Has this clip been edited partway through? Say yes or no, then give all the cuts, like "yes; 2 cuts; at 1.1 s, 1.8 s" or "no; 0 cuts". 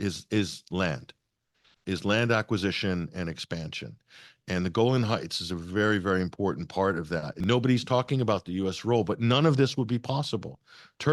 yes; 1 cut; at 7.3 s